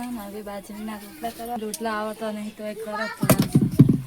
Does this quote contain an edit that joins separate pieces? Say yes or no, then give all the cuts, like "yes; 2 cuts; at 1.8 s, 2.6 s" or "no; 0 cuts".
yes; 1 cut; at 1.6 s